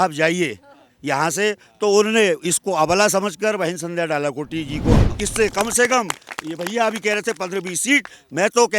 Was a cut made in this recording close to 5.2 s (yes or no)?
yes